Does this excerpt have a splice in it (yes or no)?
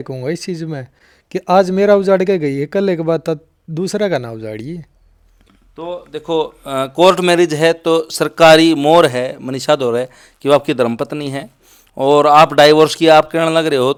no